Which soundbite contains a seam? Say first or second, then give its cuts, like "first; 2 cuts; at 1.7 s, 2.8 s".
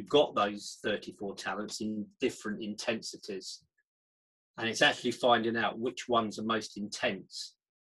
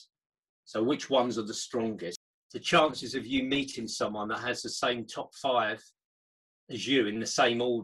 second; 1 cut; at 2.1 s